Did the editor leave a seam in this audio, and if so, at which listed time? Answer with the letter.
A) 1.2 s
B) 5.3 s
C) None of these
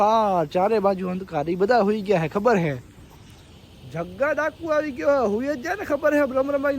B